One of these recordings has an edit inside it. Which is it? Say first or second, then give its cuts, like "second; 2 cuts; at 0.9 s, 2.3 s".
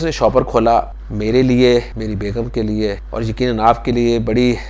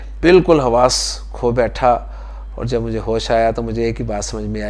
first; 3 cuts; at 1.0 s, 1.9 s, 3.0 s